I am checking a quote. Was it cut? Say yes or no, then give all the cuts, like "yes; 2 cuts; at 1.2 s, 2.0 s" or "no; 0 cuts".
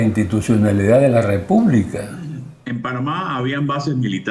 yes; 1 cut; at 2.5 s